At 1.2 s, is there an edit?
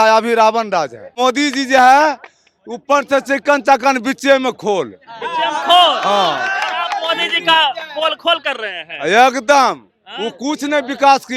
yes; 1 cut; at 1.2 s

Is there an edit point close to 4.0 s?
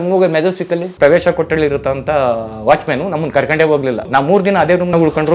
yes; 2 cuts; at 0.9 s, 4.0 s

